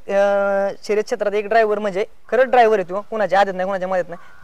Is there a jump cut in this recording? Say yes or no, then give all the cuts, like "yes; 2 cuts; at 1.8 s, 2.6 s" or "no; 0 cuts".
no; 0 cuts